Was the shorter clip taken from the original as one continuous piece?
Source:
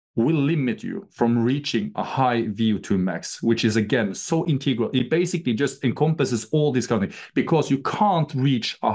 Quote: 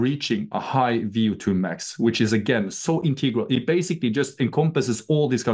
yes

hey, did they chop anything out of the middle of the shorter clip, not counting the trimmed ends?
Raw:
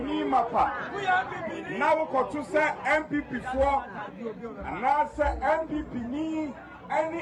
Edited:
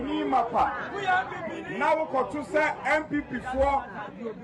no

